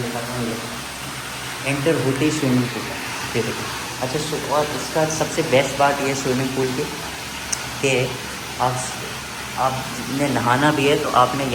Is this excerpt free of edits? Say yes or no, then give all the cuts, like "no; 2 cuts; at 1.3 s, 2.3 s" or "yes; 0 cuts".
yes; 0 cuts